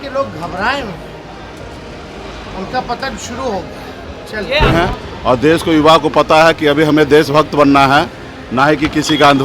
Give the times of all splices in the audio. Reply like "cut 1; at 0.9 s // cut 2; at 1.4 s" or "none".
cut 1; at 4.7 s